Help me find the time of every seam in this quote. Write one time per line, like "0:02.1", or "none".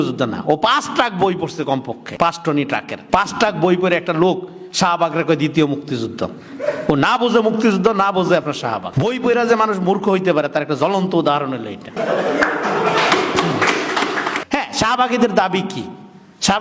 0:02.0
0:02.9
0:08.9
0:11.9
0:14.3